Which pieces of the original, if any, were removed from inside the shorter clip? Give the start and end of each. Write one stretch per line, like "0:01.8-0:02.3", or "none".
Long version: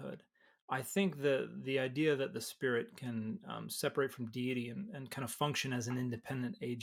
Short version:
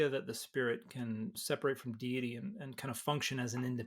0:03.4-0:03.7